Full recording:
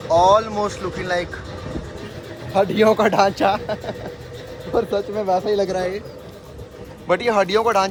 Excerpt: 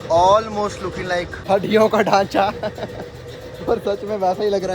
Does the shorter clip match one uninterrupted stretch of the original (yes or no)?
no